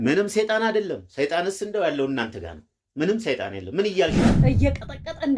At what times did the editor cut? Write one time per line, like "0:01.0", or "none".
0:04.4